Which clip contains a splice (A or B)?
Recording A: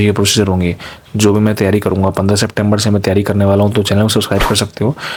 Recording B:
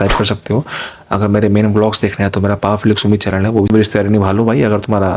B